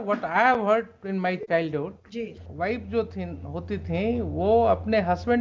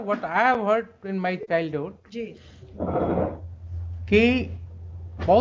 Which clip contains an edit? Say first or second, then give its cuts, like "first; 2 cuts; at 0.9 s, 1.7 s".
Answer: first; 1 cut; at 2.4 s